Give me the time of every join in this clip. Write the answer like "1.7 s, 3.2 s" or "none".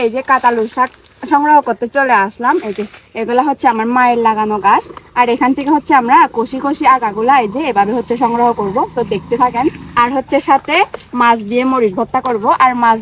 none